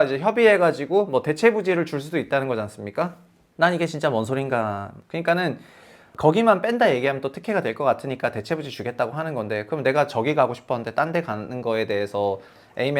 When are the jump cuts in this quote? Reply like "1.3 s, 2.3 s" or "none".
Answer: 5.0 s, 6.1 s